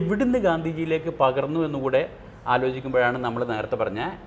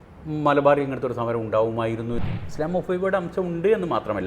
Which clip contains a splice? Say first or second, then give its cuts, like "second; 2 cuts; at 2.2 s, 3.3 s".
second; 1 cut; at 2.3 s